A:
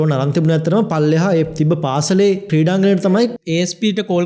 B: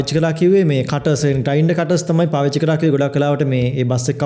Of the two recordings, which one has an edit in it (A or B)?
A